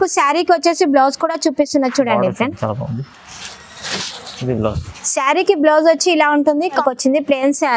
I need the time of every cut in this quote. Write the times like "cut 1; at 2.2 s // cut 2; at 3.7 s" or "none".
cut 1; at 6.8 s